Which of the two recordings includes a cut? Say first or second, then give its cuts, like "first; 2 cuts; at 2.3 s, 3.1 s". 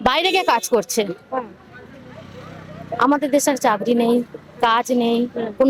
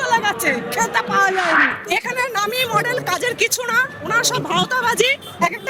second; 1 cut; at 1.8 s